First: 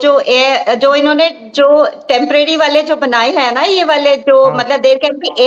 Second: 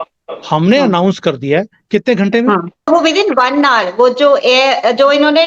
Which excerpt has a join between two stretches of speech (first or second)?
second